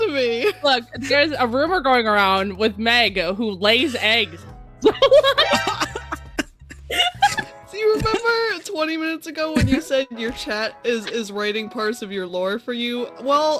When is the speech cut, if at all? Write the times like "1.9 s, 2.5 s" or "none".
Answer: none